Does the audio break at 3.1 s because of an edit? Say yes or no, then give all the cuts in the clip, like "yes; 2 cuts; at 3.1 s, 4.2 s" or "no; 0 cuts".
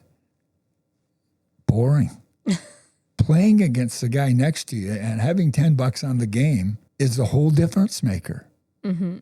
no; 1 cut; at 6.8 s